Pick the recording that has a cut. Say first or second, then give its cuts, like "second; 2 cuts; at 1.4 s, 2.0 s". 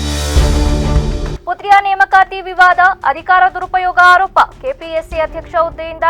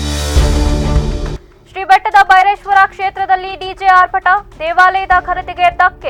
first; 1 cut; at 1.3 s